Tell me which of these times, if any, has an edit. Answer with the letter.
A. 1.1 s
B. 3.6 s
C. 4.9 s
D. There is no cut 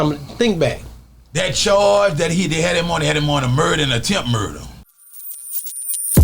C